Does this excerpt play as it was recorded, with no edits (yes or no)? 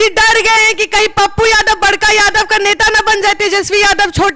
yes